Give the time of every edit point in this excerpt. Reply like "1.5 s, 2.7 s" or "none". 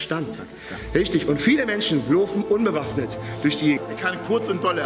3.8 s